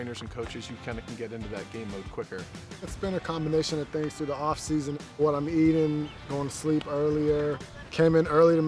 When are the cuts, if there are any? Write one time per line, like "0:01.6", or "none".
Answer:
0:02.5
0:05.1
0:07.7